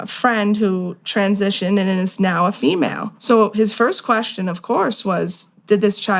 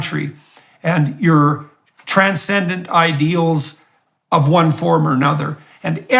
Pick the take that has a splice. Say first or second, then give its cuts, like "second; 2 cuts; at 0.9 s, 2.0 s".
first; 1 cut; at 3.1 s